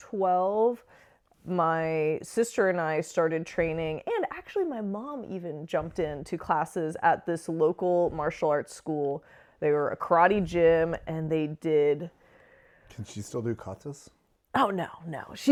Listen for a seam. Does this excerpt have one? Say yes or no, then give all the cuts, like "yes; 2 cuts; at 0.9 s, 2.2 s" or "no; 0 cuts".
no; 0 cuts